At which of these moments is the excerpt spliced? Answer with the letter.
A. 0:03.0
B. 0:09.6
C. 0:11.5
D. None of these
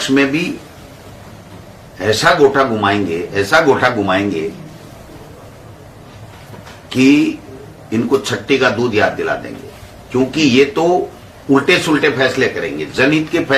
D